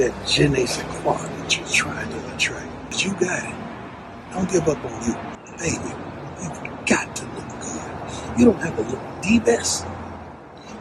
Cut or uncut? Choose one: uncut